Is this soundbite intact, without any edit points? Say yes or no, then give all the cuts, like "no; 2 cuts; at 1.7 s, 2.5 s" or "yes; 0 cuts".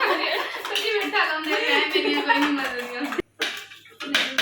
no; 1 cut; at 3.2 s